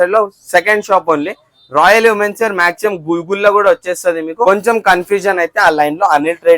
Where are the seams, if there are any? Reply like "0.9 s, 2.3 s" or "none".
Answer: 4.4 s